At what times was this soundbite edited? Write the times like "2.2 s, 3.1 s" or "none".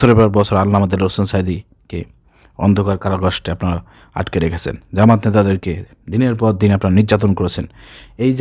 none

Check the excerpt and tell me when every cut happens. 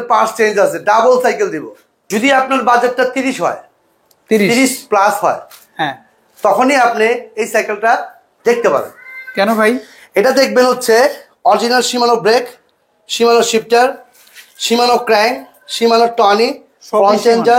none

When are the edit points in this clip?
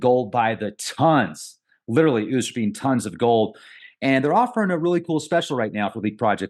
3.7 s

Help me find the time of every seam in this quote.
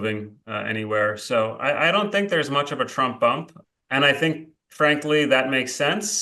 3.6 s

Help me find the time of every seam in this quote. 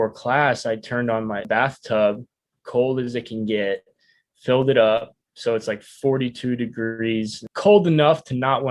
1.4 s, 7.4 s

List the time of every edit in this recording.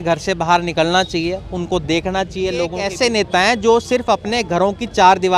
2.8 s

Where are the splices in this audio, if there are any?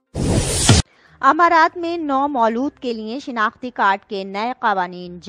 0.9 s

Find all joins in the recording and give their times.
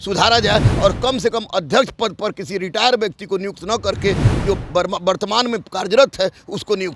none

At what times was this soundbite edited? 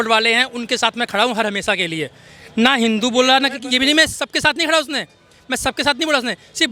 none

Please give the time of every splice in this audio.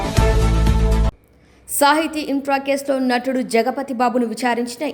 1.1 s

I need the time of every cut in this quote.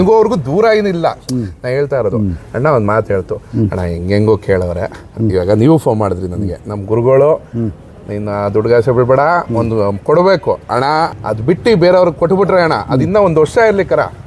11.2 s

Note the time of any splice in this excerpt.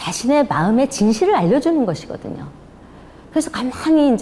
none

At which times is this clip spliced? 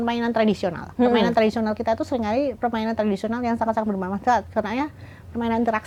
none

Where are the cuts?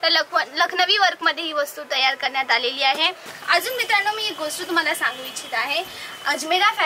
3.3 s

